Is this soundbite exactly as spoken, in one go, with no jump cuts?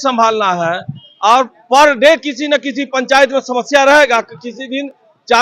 yes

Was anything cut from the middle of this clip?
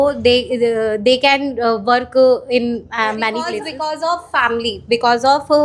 yes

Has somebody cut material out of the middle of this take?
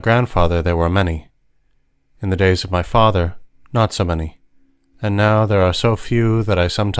yes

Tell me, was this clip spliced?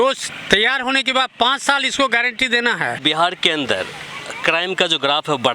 yes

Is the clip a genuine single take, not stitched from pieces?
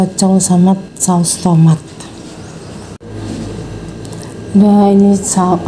no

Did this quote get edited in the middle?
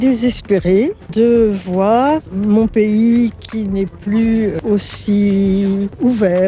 no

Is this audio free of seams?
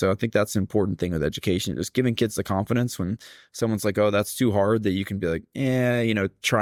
yes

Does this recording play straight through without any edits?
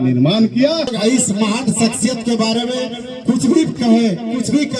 no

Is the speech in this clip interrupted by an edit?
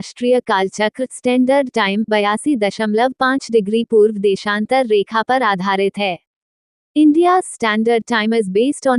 no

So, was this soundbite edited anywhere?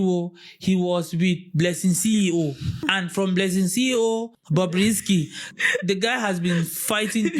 yes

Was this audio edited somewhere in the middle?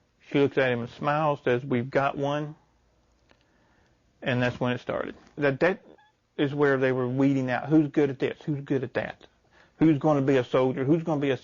yes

